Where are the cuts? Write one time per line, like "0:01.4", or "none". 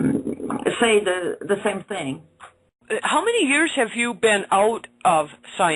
none